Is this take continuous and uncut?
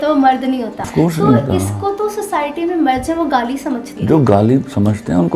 no; 2 cuts; at 0.9 s, 3.9 s

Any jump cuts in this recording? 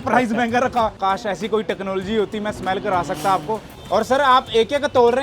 yes; 2 cuts; at 0.9 s, 3.7 s

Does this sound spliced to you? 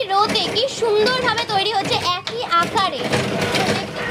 yes; 1 cut; at 3.0 s

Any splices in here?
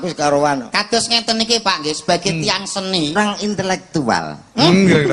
yes; 1 cut; at 3.1 s

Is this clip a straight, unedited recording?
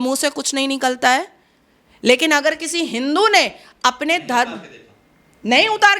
yes; 0 cuts

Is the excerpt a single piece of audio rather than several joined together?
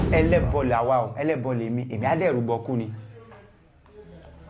yes; 0 cuts

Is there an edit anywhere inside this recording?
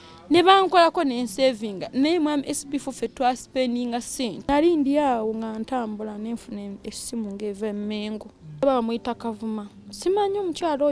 yes; 2 cuts; at 4.5 s, 8.6 s

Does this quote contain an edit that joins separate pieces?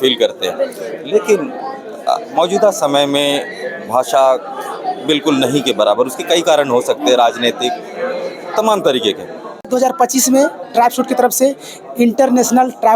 yes; 1 cut; at 9.7 s

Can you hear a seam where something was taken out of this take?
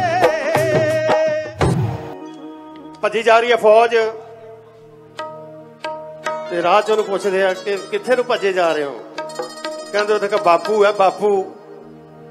yes; 1 cut; at 1.8 s

